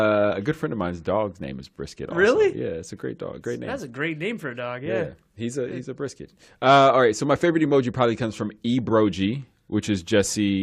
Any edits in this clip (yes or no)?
yes